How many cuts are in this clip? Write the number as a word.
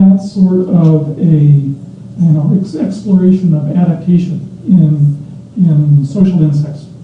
one